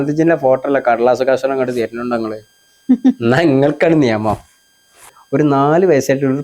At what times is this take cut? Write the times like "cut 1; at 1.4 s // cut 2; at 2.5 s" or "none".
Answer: cut 1; at 5.2 s